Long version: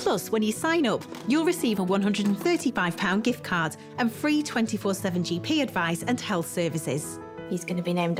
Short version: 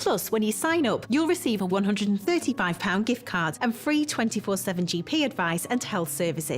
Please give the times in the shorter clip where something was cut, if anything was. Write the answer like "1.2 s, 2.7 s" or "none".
1.0 s, 3.5 s